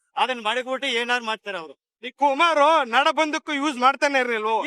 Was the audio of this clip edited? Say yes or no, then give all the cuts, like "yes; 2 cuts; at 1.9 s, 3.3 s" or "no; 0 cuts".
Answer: no; 0 cuts